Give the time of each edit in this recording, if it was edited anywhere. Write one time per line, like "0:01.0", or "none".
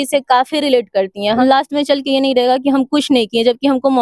0:01.4